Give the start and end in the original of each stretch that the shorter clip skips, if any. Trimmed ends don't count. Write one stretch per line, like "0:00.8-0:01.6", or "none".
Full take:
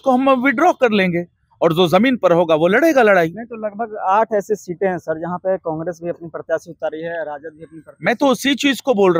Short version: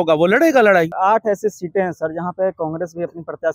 0:03.3-0:04.0